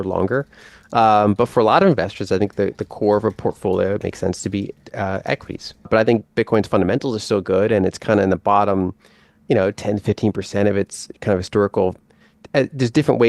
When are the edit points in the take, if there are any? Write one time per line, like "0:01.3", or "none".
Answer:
0:05.9